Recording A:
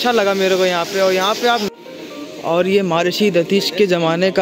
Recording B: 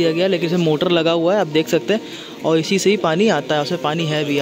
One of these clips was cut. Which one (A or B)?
A